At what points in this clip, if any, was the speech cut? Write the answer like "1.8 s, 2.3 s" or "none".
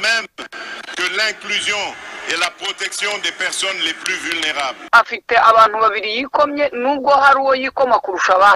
4.9 s